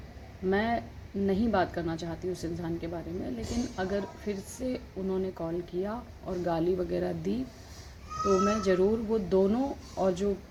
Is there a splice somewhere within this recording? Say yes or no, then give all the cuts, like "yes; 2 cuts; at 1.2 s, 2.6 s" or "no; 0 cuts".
no; 0 cuts